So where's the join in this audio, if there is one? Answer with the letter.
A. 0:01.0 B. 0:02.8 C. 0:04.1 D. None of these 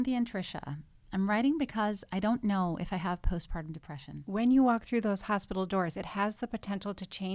C